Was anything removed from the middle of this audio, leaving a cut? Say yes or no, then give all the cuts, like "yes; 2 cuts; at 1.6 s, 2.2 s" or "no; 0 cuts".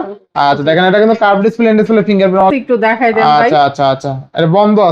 yes; 1 cut; at 2.4 s